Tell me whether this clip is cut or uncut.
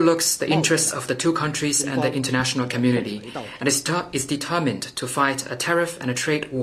uncut